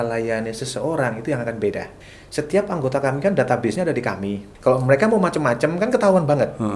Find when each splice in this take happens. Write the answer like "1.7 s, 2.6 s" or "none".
2.0 s, 4.4 s